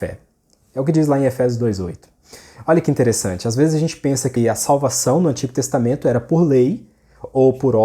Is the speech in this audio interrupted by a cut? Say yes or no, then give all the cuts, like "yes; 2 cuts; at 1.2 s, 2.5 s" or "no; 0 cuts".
yes; 1 cut; at 4.3 s